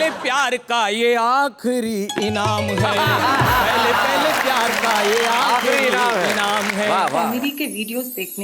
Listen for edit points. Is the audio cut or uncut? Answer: cut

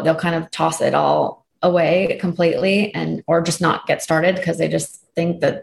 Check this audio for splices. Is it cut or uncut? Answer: uncut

